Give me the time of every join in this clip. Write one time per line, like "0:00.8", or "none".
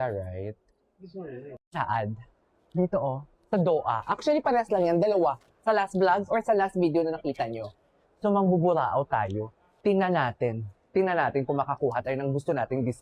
0:01.6